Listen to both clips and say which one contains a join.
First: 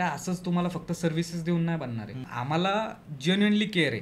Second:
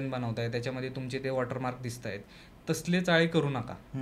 first; 1 cut; at 2.3 s

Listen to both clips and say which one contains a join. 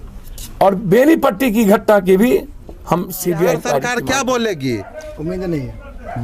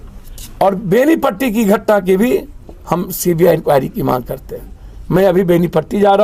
first; 1 cut; at 3.8 s

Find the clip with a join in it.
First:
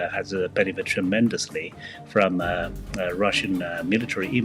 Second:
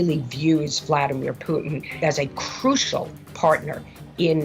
second; 1 cut; at 1.9 s

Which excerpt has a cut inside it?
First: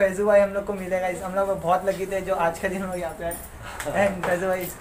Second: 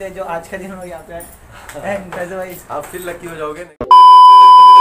second; 1 cut; at 3.6 s

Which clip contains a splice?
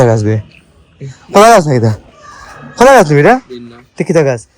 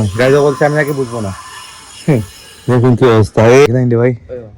second; 1 cut; at 3.7 s

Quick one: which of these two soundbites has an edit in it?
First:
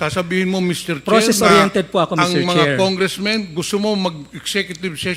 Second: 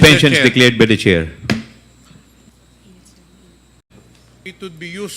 second; 1 cut; at 4.0 s

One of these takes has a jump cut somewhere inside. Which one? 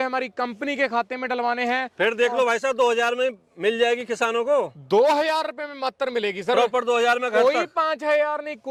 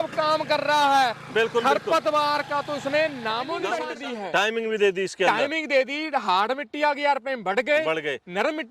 second; 1 cut; at 3.8 s

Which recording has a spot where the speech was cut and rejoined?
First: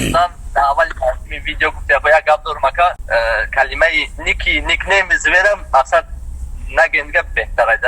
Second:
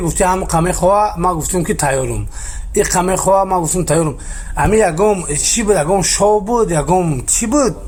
first; 1 cut; at 3.0 s

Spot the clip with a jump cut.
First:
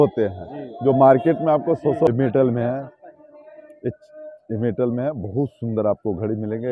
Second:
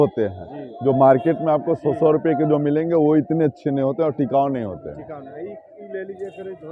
first; 1 cut; at 2.1 s

